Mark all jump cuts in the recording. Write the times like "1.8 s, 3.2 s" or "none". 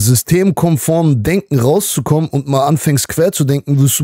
none